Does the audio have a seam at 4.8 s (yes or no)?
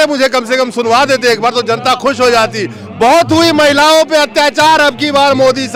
no